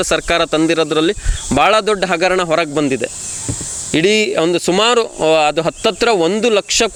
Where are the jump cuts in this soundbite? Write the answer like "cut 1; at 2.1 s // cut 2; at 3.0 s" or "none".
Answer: none